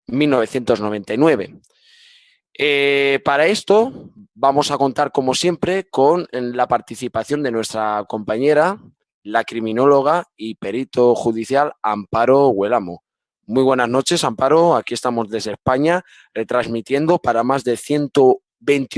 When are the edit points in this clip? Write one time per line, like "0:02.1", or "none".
0:11.9